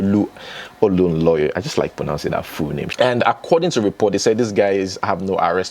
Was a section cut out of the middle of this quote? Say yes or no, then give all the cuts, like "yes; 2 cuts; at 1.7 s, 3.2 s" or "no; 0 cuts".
yes; 1 cut; at 2.9 s